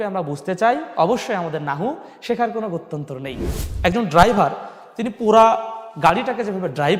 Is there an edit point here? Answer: yes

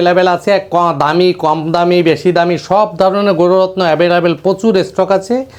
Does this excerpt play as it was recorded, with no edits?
yes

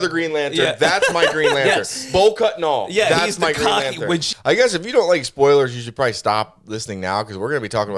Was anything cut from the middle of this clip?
yes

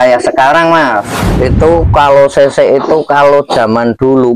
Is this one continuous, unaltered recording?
no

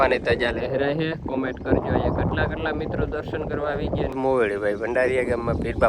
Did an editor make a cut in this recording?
yes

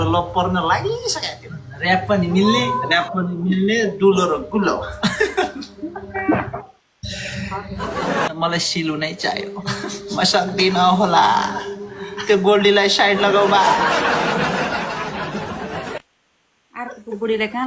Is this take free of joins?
no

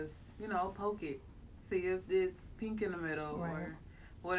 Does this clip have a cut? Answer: no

